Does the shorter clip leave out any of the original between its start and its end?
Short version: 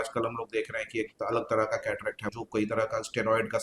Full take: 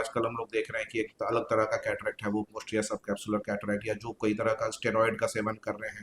yes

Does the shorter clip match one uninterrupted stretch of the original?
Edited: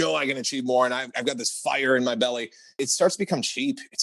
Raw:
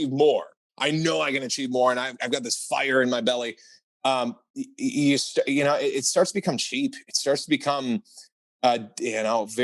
no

